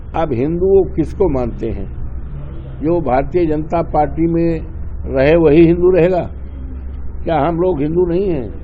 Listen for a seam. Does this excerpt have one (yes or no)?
no